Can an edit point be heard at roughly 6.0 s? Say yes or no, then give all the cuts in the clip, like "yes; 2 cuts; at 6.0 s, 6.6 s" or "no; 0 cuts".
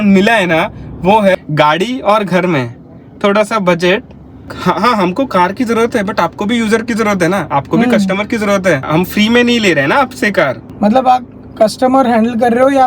no; 3 cuts; at 1.3 s, 4.5 s, 10.7 s